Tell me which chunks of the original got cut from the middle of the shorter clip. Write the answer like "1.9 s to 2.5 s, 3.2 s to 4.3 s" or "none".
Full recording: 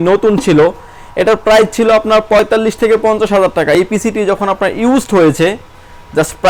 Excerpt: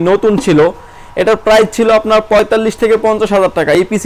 none